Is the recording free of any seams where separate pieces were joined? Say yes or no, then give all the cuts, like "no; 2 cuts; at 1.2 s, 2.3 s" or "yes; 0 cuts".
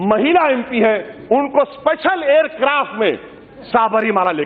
yes; 0 cuts